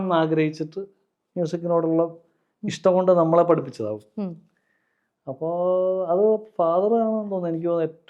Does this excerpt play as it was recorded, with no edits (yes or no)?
yes